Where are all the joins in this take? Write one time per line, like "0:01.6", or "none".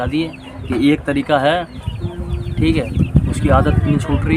0:01.8